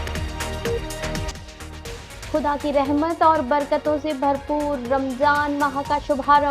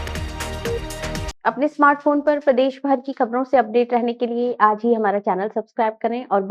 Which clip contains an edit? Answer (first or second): first